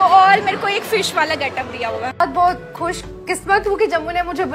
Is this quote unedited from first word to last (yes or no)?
no